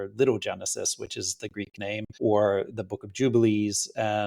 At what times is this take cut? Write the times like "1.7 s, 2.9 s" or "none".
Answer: 2.1 s